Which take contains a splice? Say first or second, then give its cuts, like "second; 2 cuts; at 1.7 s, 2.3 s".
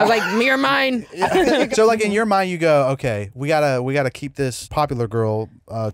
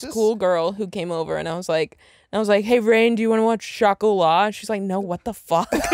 first; 2 cuts; at 1.7 s, 4.6 s